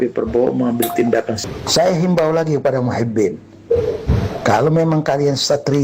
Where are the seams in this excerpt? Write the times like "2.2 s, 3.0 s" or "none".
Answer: 1.5 s